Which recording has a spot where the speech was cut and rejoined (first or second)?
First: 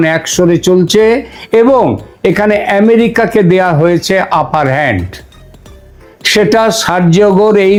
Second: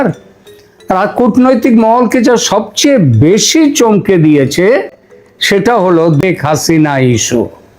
second